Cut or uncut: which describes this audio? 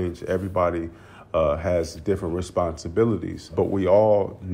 cut